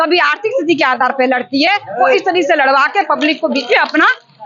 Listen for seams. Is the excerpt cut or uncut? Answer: uncut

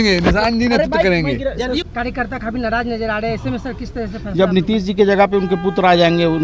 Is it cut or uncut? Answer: cut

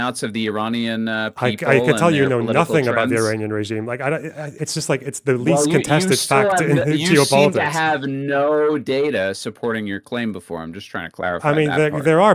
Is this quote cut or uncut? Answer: uncut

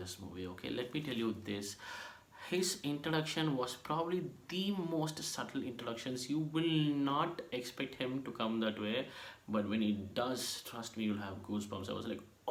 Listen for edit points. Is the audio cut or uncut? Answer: uncut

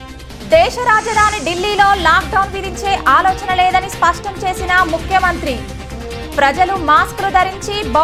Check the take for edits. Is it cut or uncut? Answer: uncut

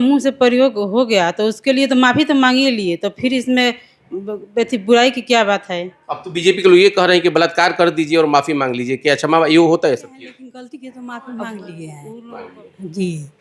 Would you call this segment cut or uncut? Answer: cut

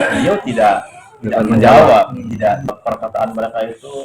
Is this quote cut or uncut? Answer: cut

